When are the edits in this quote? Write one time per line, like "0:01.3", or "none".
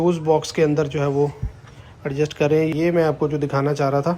0:02.7